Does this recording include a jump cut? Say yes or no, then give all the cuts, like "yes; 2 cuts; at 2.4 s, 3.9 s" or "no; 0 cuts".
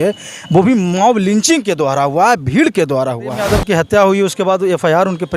yes; 1 cut; at 3.4 s